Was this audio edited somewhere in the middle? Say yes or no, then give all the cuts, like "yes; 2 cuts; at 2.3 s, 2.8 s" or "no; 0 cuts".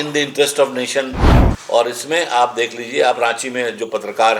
yes; 1 cut; at 1.3 s